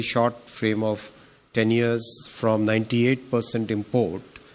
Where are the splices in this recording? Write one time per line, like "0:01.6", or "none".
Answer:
none